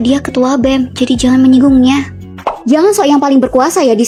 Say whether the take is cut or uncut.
uncut